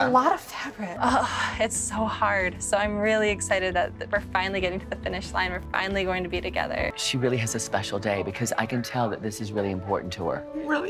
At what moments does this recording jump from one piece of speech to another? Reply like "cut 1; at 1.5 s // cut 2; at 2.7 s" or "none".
none